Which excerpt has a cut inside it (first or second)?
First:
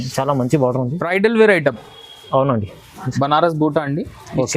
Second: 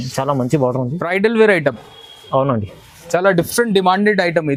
first